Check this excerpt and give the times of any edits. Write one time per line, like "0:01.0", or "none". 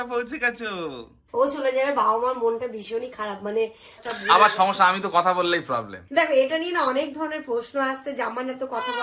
0:01.1
0:04.0